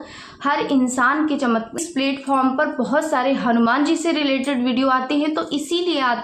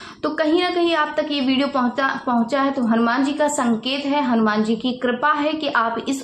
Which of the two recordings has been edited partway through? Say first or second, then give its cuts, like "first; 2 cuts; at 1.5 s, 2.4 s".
first; 1 cut; at 1.8 s